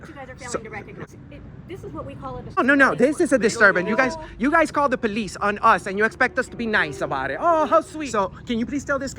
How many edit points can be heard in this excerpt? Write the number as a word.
three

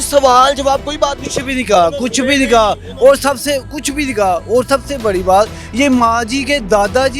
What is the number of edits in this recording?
zero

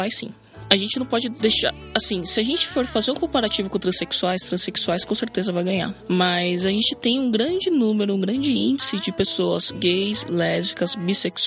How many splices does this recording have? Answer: one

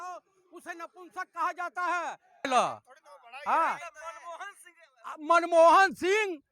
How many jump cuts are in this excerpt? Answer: one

